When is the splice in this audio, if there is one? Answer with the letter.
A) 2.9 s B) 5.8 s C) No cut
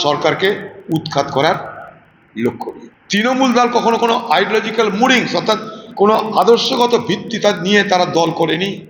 A